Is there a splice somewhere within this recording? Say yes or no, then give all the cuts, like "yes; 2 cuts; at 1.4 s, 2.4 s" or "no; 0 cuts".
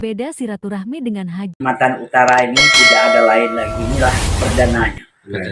yes; 1 cut; at 1.6 s